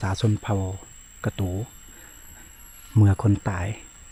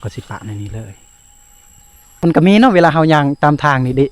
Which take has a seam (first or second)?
second